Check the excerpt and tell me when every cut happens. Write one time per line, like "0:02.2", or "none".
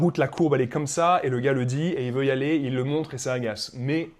none